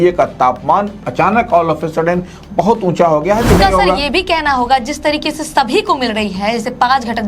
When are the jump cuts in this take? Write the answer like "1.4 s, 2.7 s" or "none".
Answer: 3.5 s